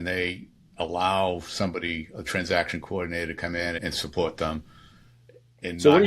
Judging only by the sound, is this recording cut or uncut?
cut